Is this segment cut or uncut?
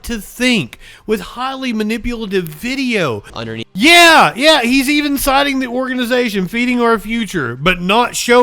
cut